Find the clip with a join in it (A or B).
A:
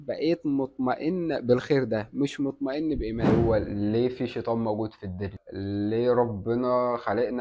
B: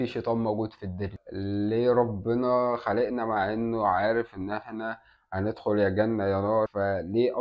A